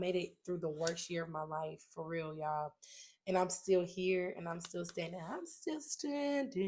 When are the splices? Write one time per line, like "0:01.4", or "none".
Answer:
none